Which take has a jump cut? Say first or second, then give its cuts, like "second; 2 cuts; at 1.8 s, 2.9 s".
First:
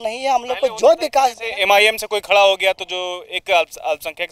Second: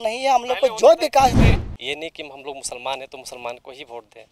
second; 1 cut; at 1.5 s